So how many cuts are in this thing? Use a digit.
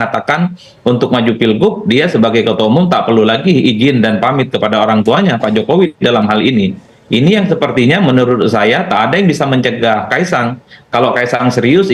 0